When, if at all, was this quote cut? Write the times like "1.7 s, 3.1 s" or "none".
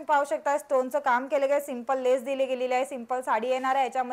none